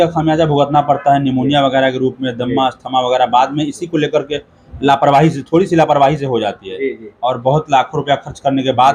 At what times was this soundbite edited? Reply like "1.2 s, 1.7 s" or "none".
none

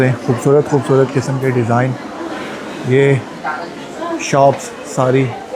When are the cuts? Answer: none

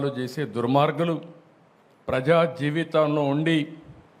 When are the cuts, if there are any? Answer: none

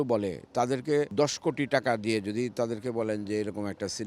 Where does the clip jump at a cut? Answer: 1.1 s

